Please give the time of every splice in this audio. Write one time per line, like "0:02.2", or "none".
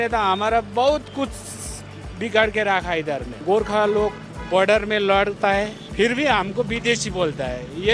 0:03.3
0:05.8